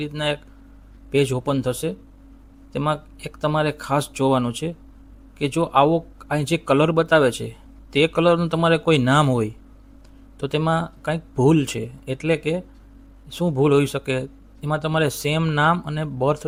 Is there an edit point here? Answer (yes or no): no